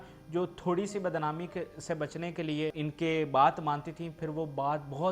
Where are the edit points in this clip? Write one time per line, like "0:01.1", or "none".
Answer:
0:02.8